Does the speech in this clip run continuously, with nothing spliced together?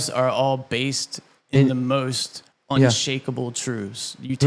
yes; 0 cuts

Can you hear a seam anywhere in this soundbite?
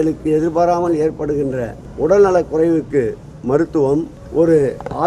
yes; 2 cuts; at 1.8 s, 4.2 s

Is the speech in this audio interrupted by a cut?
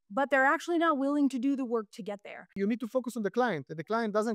yes; 1 cut; at 2.6 s

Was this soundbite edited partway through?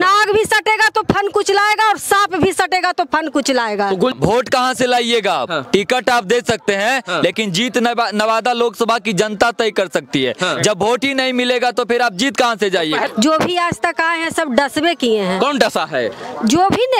yes; 2 cuts; at 4.1 s, 13.1 s

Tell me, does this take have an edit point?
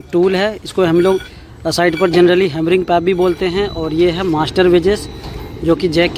no; 0 cuts

